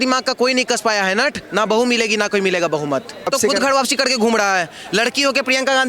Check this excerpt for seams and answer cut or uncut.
cut